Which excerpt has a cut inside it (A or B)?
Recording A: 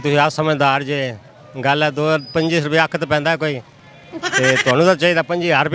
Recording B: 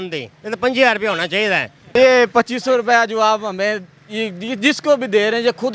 B